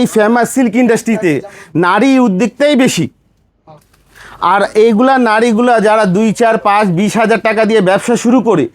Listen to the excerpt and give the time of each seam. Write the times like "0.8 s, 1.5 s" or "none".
none